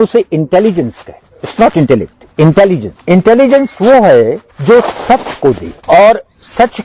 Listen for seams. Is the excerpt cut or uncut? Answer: cut